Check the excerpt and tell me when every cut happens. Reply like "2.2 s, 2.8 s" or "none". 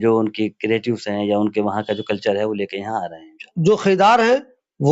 3.4 s